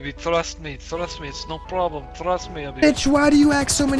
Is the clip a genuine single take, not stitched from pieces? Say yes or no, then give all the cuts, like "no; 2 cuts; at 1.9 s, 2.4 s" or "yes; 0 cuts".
no; 1 cut; at 2.5 s